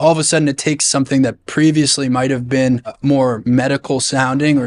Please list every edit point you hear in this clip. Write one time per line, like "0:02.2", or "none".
0:03.0